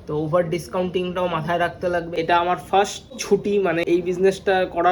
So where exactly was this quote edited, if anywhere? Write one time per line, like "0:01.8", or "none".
0:02.1
0:03.5